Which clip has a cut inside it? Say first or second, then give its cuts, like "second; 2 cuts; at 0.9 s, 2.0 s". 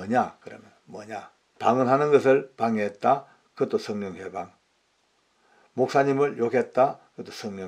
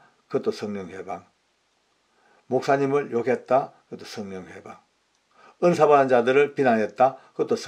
first; 1 cut; at 1.4 s